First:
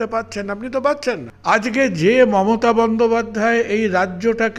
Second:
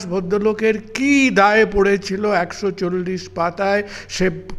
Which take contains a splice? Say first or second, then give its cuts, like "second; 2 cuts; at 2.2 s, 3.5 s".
first; 1 cut; at 1.3 s